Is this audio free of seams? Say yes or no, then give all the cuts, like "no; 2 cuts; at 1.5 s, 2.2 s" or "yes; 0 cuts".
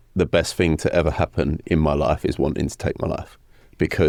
yes; 0 cuts